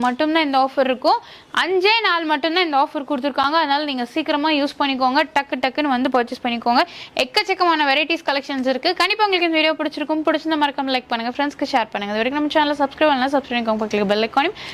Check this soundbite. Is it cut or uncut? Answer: uncut